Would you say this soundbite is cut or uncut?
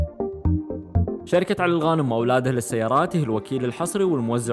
cut